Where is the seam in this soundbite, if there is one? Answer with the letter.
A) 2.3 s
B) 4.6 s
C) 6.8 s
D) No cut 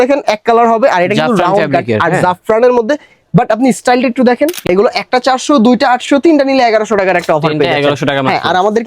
B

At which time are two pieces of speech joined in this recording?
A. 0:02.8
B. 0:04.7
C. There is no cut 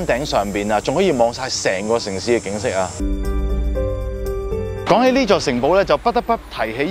B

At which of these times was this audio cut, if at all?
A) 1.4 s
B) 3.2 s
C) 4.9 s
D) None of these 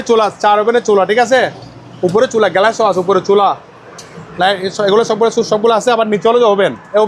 D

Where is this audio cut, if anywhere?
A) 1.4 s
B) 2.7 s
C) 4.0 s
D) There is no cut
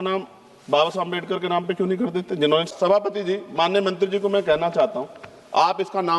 B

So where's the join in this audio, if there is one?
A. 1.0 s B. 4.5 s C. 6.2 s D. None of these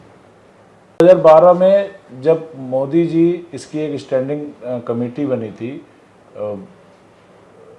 A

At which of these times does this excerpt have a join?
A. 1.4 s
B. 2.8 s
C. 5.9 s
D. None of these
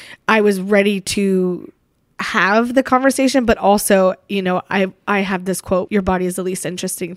C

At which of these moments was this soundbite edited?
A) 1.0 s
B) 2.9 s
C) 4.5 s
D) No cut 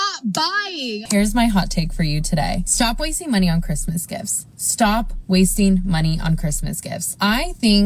A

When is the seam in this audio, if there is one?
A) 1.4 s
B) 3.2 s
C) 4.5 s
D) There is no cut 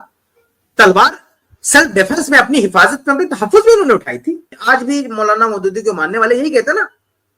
C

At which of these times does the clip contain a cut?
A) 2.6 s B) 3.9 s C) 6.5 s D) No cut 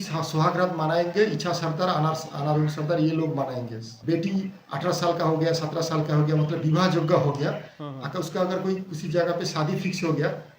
B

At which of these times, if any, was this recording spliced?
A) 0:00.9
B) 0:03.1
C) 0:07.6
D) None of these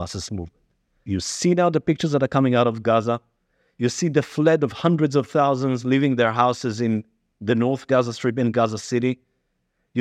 A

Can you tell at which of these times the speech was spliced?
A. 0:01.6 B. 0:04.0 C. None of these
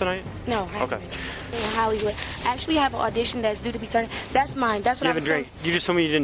A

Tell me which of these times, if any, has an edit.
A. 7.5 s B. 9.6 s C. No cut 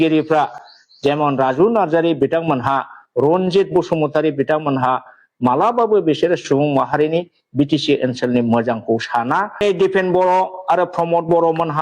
B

